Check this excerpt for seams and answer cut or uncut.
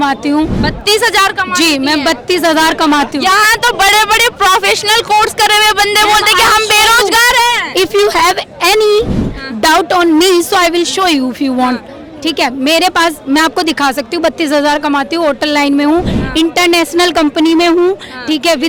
uncut